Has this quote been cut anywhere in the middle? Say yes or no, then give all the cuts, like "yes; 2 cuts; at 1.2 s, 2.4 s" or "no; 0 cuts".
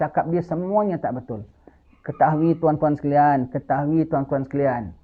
no; 0 cuts